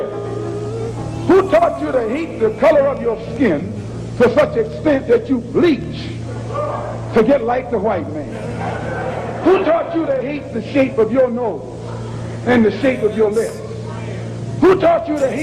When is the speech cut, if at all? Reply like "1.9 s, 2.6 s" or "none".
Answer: none